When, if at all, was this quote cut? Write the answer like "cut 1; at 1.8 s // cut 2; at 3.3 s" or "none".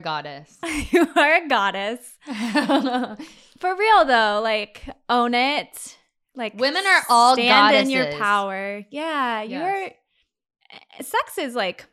none

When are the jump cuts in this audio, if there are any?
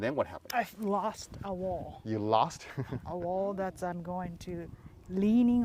none

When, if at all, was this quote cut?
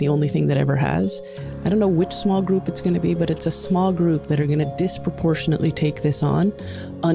cut 1; at 1.4 s

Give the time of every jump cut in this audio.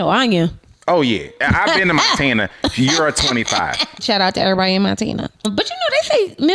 cut 1; at 1.3 s // cut 2; at 4.0 s // cut 3; at 5.5 s

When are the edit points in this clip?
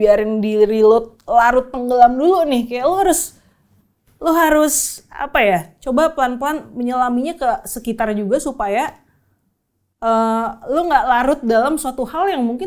none

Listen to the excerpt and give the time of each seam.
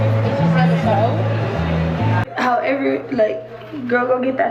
cut 1; at 2.2 s

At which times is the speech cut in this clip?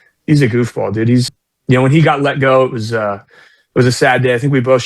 cut 1; at 1.3 s

